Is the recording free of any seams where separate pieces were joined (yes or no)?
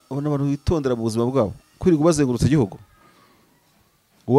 yes